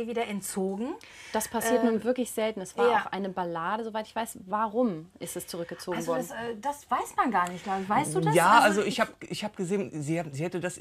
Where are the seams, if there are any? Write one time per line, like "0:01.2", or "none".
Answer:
none